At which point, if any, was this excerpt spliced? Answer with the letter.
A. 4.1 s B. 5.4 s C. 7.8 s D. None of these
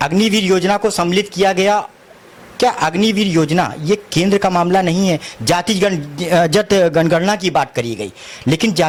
D